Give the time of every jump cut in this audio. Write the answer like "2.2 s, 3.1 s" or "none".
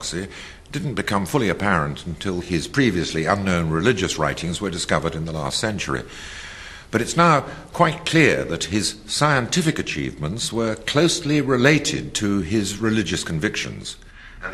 none